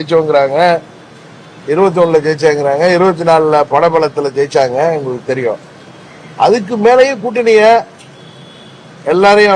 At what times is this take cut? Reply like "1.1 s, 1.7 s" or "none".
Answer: none